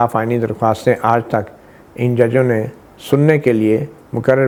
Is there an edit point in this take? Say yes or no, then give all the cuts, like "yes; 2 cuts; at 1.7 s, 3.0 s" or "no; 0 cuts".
no; 0 cuts